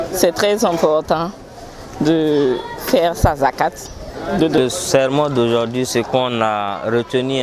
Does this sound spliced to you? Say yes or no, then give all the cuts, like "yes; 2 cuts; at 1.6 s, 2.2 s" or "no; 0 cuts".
yes; 1 cut; at 4.6 s